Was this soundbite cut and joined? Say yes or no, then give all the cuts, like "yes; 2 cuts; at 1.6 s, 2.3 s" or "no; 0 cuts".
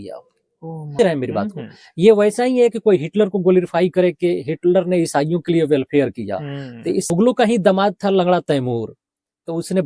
yes; 2 cuts; at 1.0 s, 7.1 s